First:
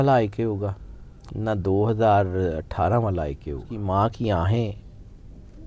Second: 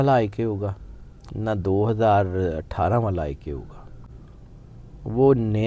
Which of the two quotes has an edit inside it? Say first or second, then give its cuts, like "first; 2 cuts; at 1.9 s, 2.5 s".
first; 1 cut; at 3.8 s